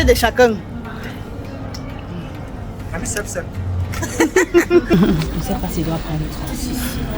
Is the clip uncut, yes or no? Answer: no